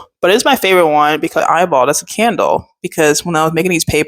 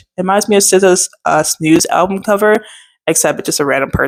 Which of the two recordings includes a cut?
first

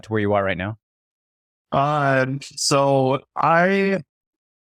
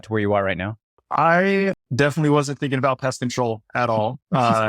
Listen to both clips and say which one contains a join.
second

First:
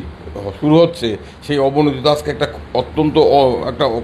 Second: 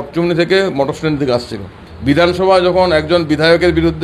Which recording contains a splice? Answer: second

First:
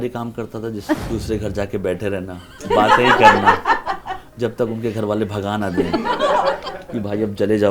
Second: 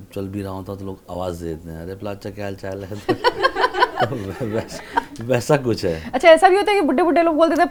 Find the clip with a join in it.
first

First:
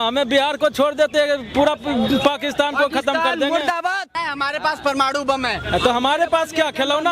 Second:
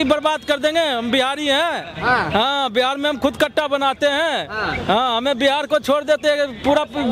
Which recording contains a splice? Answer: first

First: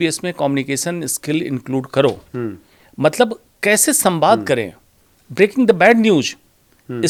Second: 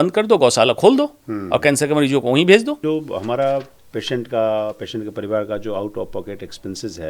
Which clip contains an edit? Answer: second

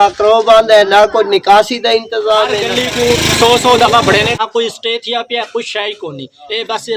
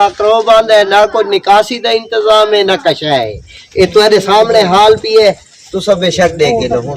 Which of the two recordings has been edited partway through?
first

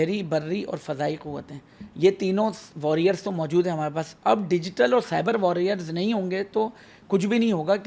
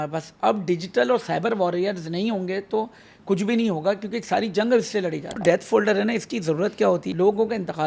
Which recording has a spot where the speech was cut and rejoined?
second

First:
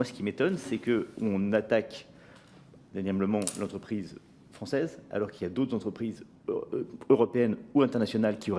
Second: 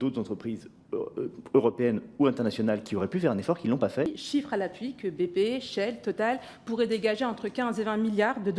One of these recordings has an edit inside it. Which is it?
second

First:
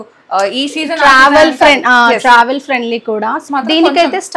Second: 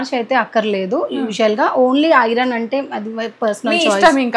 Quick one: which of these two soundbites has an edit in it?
first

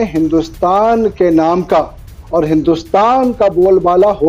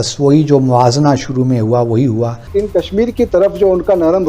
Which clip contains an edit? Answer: second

